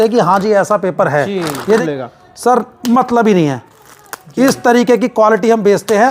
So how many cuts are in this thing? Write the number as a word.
one